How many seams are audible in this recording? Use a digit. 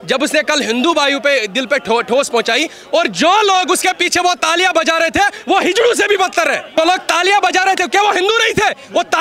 1